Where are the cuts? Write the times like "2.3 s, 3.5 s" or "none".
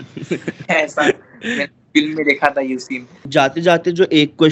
3.2 s